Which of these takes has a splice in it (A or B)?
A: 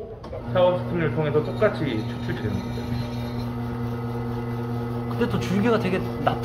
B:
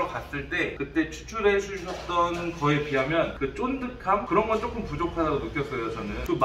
A